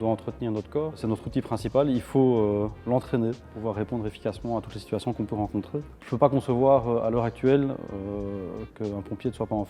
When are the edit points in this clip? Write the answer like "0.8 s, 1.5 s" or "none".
none